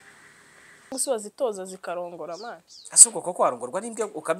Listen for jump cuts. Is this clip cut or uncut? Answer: cut